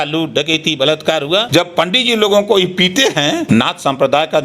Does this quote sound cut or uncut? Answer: cut